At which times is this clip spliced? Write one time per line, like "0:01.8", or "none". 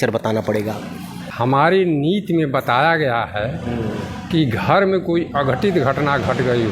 0:01.2